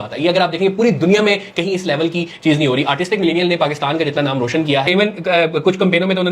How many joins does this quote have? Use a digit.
1